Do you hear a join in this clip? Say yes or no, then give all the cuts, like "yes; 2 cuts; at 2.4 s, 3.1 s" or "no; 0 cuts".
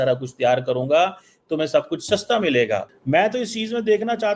yes; 1 cut; at 2.9 s